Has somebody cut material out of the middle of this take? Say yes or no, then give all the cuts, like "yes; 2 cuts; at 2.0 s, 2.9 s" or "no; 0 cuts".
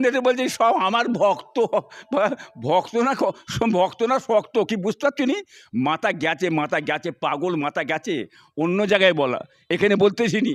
no; 0 cuts